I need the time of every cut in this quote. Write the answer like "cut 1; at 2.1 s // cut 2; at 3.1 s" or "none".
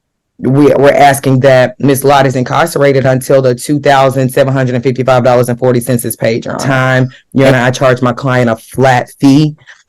cut 1; at 6.6 s